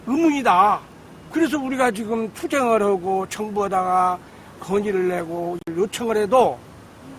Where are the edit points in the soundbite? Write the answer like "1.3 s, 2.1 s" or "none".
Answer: 5.7 s

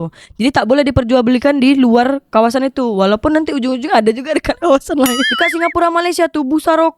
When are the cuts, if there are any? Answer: 5.2 s

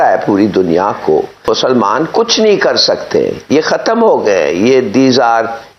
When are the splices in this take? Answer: 1.5 s

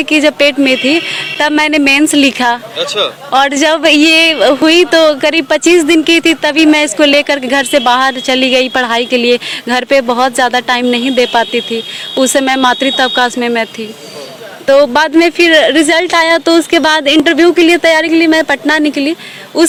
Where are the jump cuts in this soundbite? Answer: none

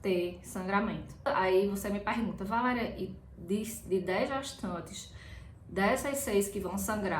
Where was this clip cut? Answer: 1.3 s

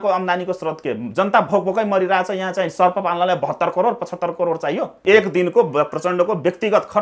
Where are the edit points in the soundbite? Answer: 4.9 s

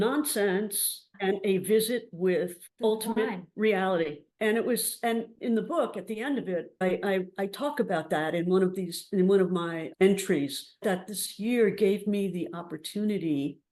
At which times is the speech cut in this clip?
6.8 s, 9.9 s, 10.8 s

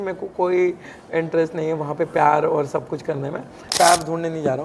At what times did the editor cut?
3.7 s

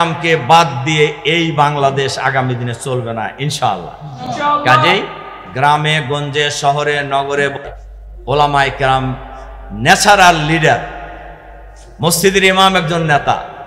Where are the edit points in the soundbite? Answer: none

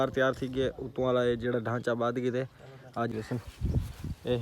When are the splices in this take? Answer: 3.1 s

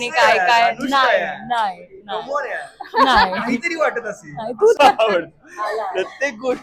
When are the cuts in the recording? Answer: 4.8 s

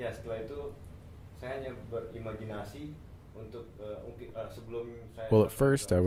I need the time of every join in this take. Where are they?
none

